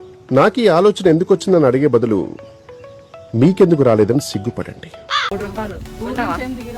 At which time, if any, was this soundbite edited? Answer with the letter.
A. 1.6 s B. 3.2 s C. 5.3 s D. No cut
C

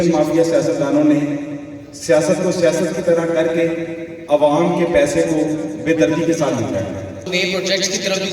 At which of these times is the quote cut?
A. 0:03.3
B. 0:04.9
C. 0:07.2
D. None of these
C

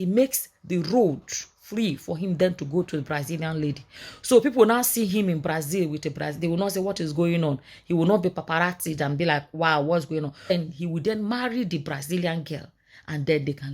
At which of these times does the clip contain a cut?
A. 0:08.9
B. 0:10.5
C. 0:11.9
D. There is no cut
B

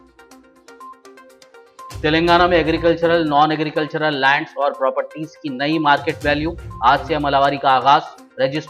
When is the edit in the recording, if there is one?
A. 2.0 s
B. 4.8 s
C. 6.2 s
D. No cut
A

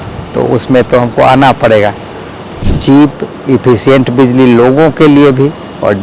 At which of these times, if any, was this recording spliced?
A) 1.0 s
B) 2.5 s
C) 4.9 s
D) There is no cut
B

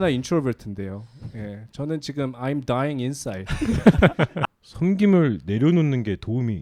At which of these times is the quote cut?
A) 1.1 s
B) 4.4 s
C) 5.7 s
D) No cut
B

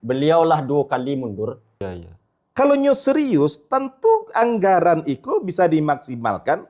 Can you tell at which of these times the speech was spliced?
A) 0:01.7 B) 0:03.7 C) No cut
A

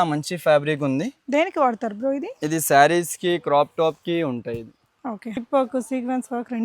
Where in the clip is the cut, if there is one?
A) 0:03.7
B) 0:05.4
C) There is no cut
B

